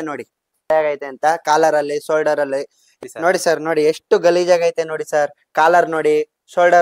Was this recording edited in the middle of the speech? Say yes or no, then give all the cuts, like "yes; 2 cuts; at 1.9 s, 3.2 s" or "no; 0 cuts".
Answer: no; 0 cuts